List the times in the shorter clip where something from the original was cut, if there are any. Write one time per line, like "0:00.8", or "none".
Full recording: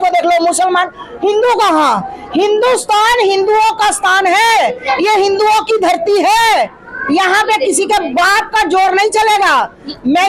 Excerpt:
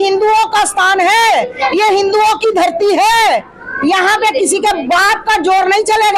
none